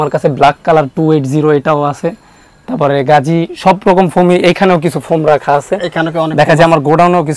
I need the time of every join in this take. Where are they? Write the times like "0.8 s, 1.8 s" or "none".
none